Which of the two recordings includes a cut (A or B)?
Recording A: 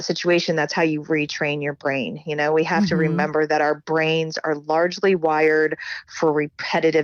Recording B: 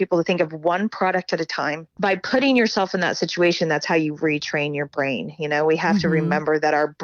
B